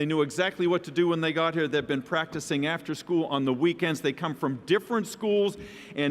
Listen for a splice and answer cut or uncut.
cut